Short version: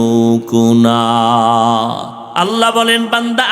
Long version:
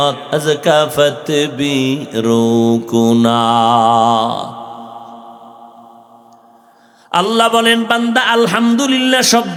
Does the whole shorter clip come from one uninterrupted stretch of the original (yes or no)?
no